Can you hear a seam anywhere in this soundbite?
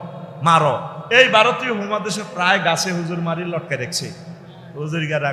yes; 1 cut; at 0.9 s

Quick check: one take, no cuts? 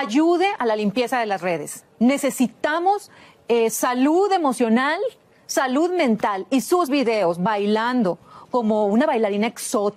yes; 0 cuts

